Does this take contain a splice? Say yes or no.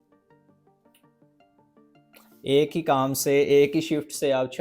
no